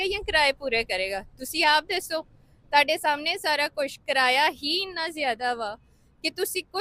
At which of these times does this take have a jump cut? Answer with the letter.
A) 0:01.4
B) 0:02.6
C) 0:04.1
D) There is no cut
D